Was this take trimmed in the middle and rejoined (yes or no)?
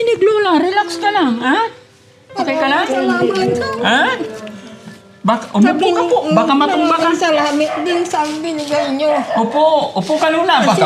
no